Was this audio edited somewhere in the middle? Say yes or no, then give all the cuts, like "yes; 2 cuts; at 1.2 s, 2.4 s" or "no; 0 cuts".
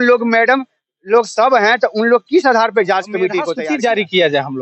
yes; 1 cut; at 3.5 s